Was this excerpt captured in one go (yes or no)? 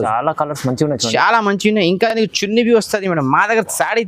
yes